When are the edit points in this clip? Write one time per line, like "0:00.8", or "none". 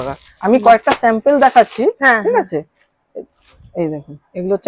none